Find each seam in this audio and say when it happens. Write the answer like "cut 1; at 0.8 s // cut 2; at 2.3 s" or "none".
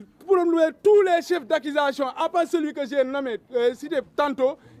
none